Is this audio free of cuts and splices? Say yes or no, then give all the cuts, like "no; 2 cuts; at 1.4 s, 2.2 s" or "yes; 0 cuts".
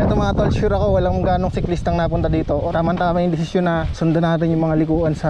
no; 2 cuts; at 2.7 s, 3.9 s